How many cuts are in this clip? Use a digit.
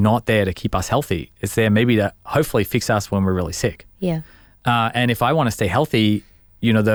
0